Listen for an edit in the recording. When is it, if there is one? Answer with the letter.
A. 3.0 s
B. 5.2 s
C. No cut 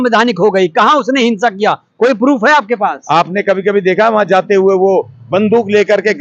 C